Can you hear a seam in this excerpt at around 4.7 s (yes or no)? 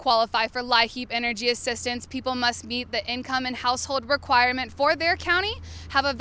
no